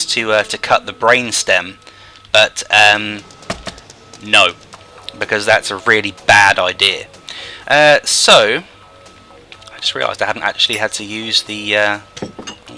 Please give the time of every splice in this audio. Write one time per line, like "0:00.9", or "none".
0:11.5